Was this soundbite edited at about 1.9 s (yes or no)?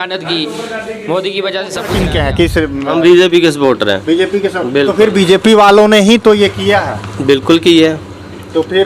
yes